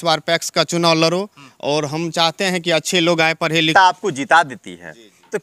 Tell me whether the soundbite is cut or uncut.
cut